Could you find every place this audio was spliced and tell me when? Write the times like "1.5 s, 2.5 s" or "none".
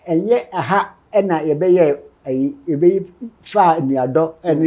none